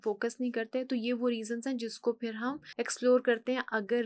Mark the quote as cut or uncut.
cut